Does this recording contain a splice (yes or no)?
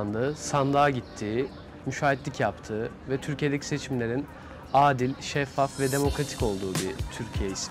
no